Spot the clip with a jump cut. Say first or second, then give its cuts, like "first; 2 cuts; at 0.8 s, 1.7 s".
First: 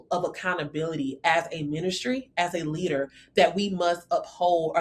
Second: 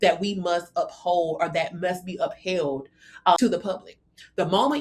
second; 1 cut; at 3.4 s